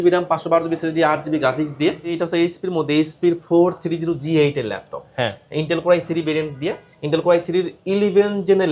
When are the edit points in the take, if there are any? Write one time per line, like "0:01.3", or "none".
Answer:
0:02.2

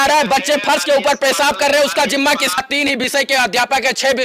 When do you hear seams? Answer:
0:02.6

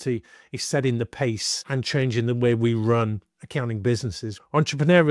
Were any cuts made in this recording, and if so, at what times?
0:01.5
0:04.3

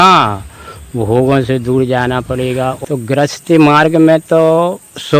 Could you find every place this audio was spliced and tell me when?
0:02.8

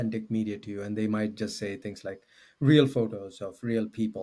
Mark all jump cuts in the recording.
none

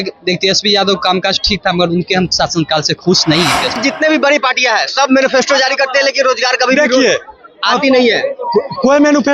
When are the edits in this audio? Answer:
0:03.8

